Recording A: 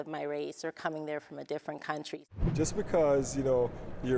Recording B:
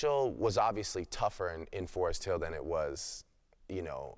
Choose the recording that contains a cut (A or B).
A